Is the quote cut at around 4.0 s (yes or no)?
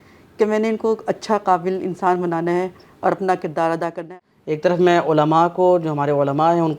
yes